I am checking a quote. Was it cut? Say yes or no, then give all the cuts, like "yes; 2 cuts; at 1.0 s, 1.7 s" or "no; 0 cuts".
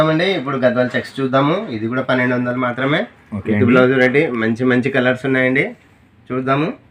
no; 0 cuts